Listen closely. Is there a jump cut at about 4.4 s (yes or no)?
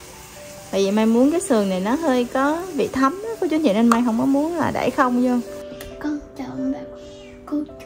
no